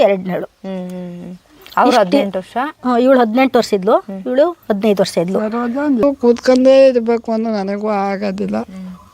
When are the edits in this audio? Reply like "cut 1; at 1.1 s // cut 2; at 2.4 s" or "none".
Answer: cut 1; at 6.0 s